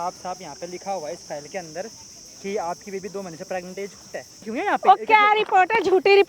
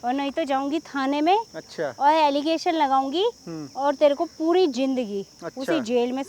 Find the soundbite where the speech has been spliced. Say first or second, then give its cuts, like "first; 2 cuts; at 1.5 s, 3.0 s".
first; 1 cut; at 4.5 s